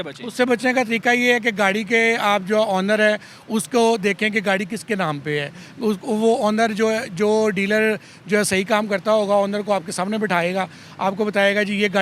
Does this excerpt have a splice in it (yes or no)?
no